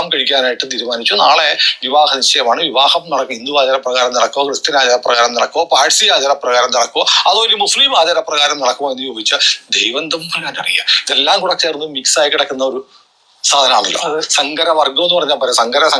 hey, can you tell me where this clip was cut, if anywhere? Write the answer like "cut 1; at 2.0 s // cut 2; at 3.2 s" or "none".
none